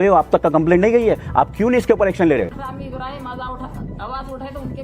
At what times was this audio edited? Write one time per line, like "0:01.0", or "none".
0:02.6